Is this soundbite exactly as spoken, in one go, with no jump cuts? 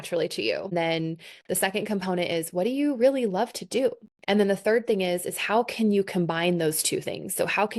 no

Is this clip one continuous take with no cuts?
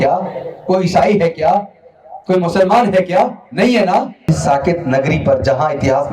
no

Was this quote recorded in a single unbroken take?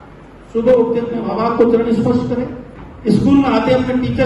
no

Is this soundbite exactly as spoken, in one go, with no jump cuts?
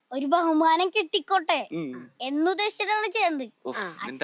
yes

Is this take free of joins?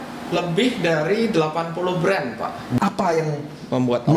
no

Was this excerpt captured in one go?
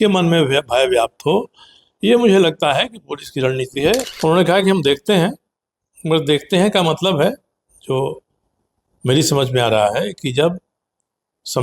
no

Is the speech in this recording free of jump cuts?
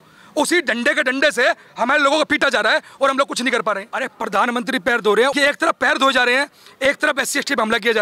no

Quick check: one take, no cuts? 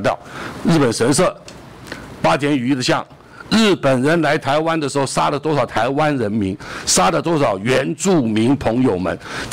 yes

